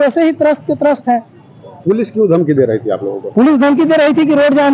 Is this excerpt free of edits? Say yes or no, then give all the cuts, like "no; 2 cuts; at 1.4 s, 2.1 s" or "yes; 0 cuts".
yes; 0 cuts